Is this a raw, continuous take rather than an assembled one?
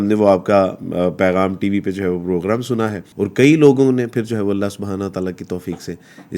no; 1 cut; at 3.0 s

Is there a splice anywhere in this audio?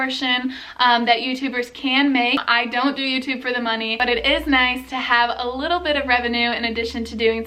yes; 2 cuts; at 2.5 s, 4.0 s

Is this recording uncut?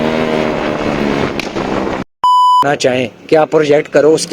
no; 1 cut; at 2.6 s

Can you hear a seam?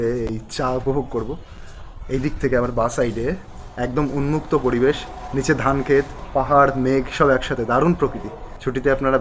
no; 0 cuts

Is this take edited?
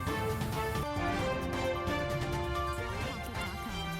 yes; 1 cut; at 1.2 s

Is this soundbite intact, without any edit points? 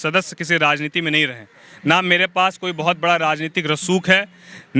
yes; 0 cuts

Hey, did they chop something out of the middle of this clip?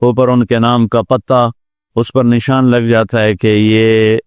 no; 0 cuts

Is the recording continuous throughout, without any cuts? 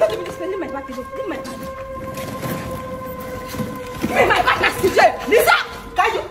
yes; 0 cuts

